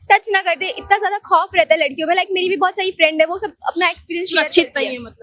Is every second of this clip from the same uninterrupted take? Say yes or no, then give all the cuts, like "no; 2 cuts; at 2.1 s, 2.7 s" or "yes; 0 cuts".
yes; 0 cuts